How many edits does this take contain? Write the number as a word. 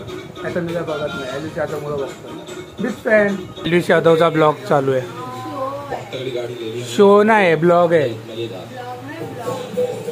one